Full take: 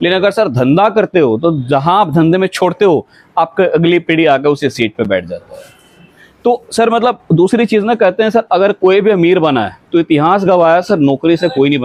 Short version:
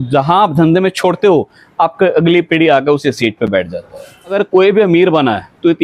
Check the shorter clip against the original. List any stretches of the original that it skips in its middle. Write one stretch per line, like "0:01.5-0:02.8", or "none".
0:05.9-0:08.6

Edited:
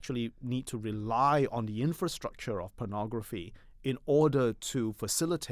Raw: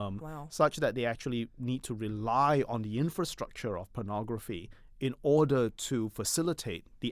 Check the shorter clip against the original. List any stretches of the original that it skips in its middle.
none

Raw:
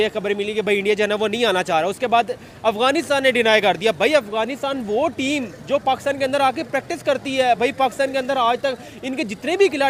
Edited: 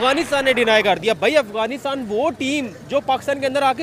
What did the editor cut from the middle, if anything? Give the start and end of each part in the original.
none

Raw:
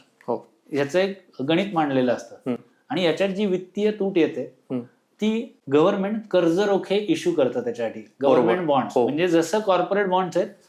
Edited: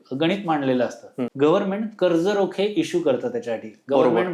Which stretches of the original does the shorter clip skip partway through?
0:02.6-0:05.6

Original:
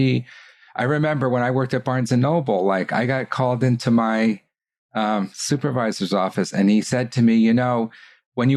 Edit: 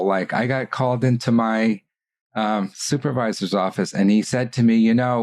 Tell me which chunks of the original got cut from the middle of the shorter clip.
none

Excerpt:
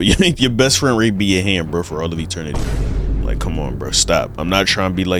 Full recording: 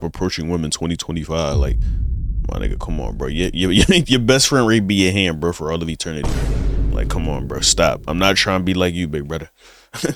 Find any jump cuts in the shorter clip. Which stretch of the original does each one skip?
none

